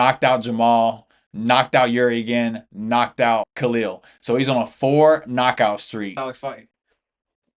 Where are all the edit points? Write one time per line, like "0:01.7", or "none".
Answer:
0:03.5
0:06.2